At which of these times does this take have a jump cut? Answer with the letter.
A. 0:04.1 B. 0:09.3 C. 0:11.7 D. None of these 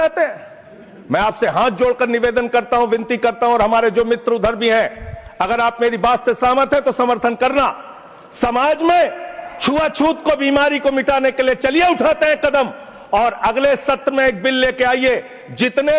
D